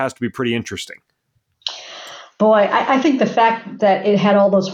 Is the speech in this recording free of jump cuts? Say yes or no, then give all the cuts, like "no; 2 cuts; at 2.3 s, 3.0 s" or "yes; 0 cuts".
yes; 0 cuts